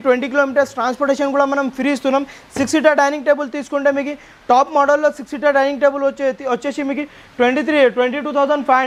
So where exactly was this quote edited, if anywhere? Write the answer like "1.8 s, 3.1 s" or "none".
none